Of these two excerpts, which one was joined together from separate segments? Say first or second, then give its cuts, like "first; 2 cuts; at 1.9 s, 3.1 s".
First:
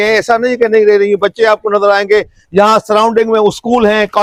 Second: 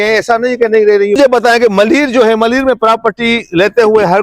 second; 1 cut; at 1.2 s